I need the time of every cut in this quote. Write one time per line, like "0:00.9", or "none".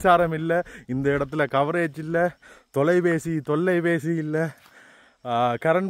none